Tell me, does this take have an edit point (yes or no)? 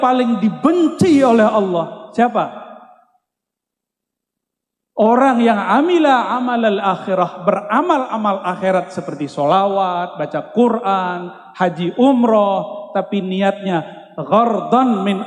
no